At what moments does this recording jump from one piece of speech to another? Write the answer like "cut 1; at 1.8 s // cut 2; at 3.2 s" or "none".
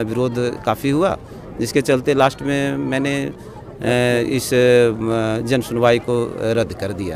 none